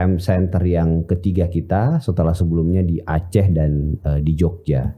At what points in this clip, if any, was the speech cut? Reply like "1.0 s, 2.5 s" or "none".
none